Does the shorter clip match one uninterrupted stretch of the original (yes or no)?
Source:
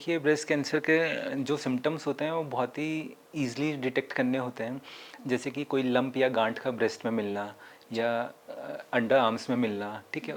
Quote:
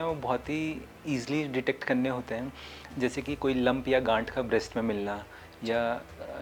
yes